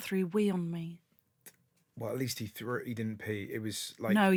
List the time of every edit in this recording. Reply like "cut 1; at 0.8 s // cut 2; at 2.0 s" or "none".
none

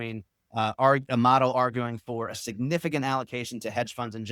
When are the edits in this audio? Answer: none

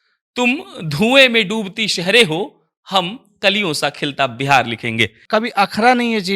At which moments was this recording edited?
cut 1; at 5.2 s

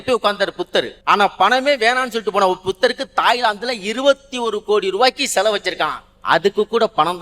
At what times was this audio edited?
cut 1; at 1.0 s

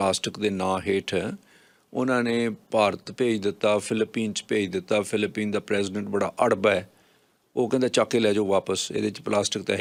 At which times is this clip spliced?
none

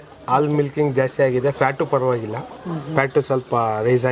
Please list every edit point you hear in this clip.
none

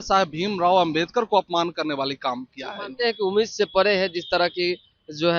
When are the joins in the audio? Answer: none

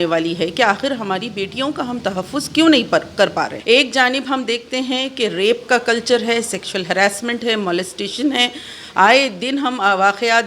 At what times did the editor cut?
cut 1; at 3.5 s

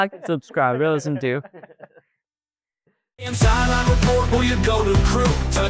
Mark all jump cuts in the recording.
cut 1; at 3.2 s

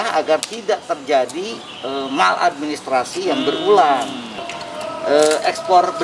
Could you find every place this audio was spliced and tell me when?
cut 1; at 4.4 s

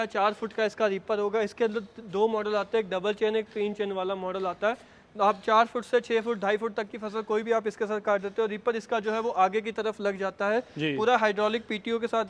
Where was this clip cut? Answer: none

